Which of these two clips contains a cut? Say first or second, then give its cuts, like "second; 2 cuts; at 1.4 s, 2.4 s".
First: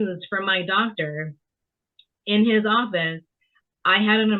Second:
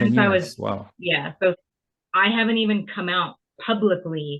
second; 1 cut; at 1.6 s